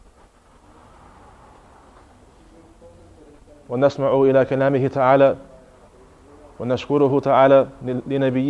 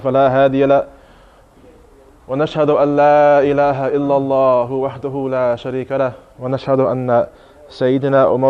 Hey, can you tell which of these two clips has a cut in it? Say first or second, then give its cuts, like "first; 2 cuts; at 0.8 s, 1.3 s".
first; 1 cut; at 4.8 s